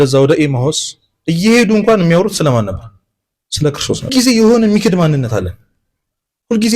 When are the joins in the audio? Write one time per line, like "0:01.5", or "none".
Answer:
0:04.1